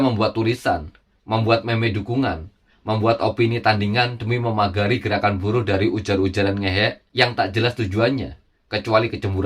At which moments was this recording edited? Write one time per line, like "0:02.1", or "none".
0:07.0